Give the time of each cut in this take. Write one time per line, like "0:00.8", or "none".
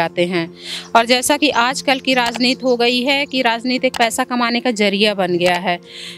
none